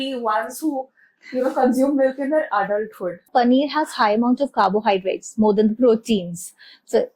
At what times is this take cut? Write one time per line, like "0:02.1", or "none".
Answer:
0:03.3